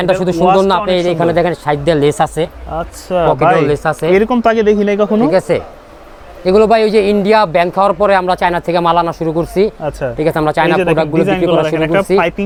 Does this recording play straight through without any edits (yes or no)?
yes